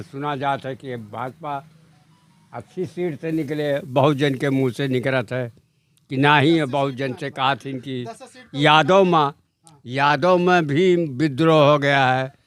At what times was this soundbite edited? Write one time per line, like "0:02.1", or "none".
none